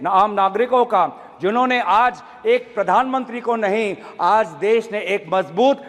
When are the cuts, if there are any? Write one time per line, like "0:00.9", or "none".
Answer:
none

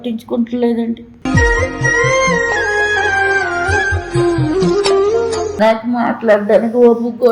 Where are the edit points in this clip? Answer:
0:05.5

